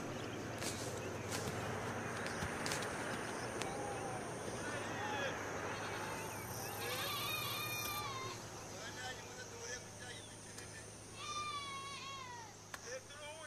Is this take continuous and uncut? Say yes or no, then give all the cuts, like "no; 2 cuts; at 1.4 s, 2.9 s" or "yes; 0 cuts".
yes; 0 cuts